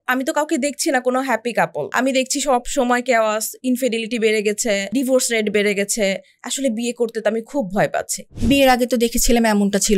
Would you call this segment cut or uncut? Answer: cut